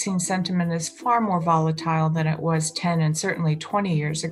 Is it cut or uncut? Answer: uncut